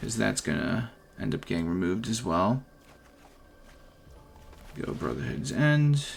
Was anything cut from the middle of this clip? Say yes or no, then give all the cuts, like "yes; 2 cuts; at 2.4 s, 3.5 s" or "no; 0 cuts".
no; 0 cuts